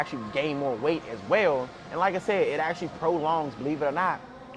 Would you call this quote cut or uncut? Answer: uncut